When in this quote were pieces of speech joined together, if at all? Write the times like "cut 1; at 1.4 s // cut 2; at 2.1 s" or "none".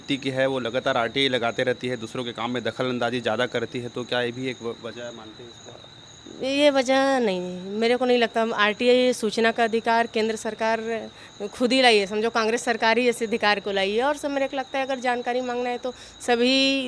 none